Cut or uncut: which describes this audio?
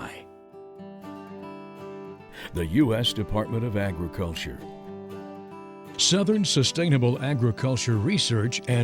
uncut